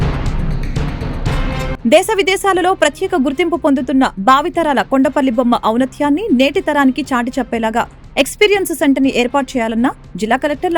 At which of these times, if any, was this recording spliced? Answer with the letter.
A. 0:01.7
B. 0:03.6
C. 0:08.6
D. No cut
A